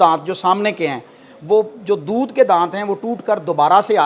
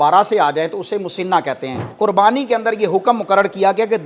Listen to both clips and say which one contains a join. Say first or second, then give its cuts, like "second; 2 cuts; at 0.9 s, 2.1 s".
second; 1 cut; at 1.8 s